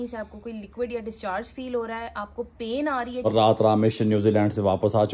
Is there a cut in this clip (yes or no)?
yes